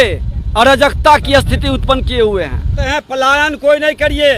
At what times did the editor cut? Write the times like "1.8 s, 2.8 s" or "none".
2.8 s